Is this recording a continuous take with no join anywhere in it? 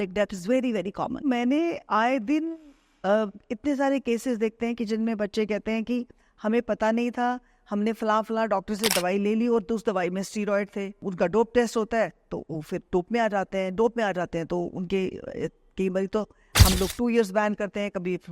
no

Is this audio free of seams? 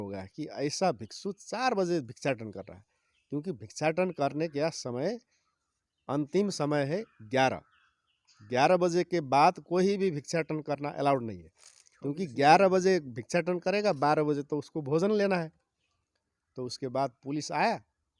yes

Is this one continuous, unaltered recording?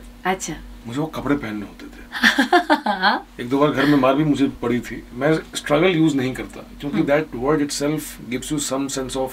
no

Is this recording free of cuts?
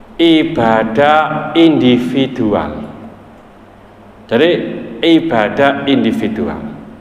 yes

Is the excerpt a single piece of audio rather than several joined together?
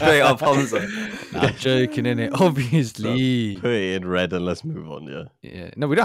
yes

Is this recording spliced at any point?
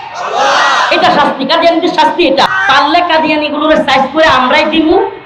yes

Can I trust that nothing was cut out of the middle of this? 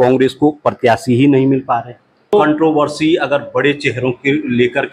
no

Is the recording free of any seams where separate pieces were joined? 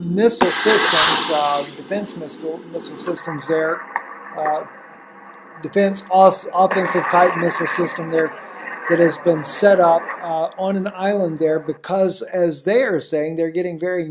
yes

